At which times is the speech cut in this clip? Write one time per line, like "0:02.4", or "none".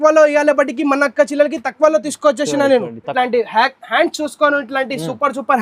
0:03.1